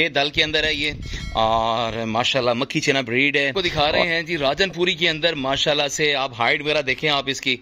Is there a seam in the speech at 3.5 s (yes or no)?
yes